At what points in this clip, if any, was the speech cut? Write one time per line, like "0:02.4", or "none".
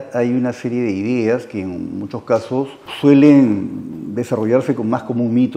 0:02.8

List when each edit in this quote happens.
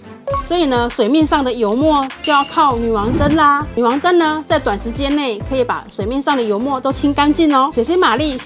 0:03.7
0:07.7

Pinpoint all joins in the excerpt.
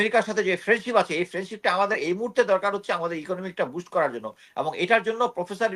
none

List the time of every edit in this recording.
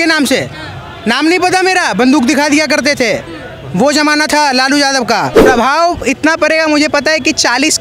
0:05.4

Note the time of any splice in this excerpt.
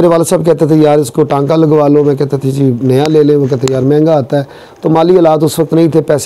none

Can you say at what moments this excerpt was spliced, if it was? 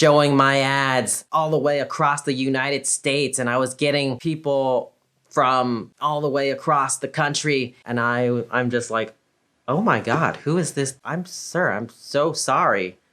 0:07.8

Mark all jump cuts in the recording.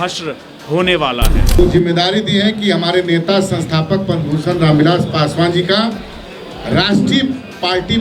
0:01.4

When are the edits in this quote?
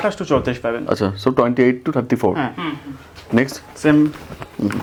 none

